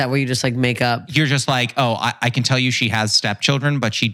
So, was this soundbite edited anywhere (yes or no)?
yes